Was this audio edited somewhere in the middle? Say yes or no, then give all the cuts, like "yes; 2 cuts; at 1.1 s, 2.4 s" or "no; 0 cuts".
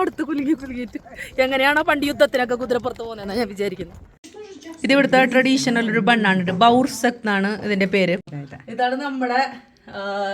yes; 2 cuts; at 4.2 s, 8.3 s